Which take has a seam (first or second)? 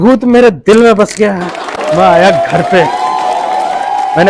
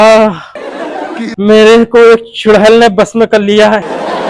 first